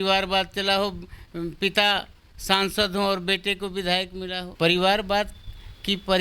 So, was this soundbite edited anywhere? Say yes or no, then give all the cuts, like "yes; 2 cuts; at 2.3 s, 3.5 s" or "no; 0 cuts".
yes; 1 cut; at 4.4 s